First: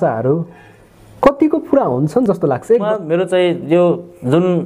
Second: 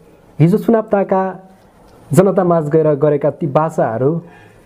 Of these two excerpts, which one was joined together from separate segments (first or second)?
first